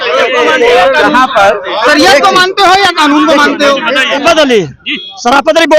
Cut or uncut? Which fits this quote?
cut